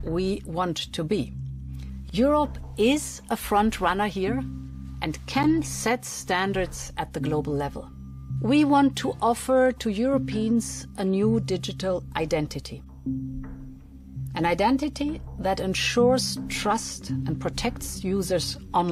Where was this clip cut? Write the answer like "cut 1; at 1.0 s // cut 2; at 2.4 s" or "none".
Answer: cut 1; at 8.3 s